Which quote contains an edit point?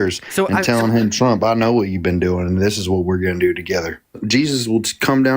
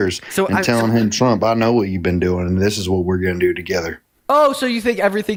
first; 1 cut; at 4.2 s

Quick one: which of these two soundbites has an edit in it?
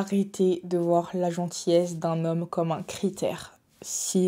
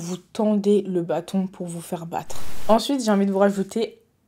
second; 1 cut; at 2.5 s

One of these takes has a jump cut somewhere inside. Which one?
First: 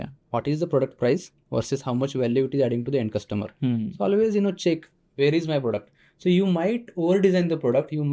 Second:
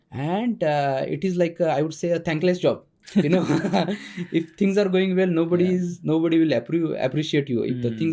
second; 1 cut; at 2.9 s

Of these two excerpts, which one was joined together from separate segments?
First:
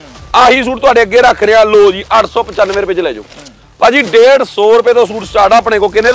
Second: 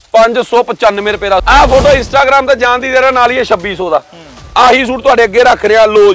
second; 1 cut; at 1.4 s

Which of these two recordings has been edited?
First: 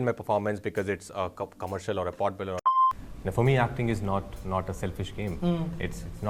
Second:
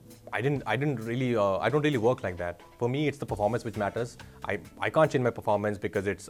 first; 1 cut; at 2.6 s

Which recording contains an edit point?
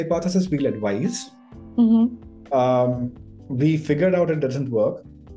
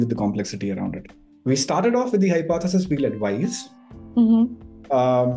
second; 1 cut; at 1.0 s

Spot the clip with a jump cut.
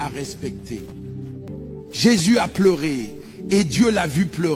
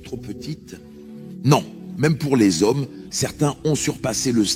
first; 1 cut; at 1.5 s

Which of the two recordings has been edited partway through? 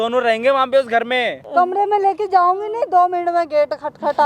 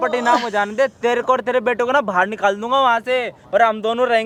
first; 1 cut; at 1.4 s

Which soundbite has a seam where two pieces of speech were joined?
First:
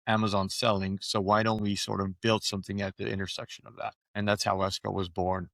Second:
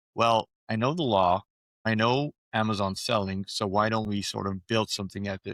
first; 1 cut; at 4.0 s

